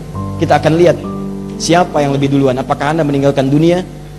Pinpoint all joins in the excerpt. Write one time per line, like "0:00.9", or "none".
none